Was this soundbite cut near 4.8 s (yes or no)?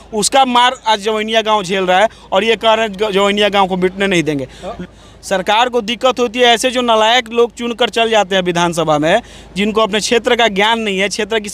yes